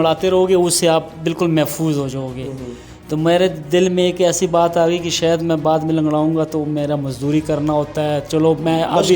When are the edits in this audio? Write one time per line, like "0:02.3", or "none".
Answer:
none